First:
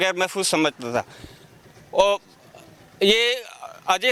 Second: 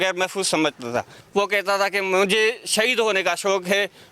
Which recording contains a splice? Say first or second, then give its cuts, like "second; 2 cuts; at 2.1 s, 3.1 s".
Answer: second; 1 cut; at 1.2 s